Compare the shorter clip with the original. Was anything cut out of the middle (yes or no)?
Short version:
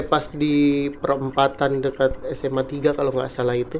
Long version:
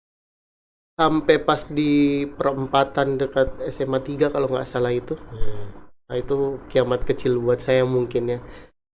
no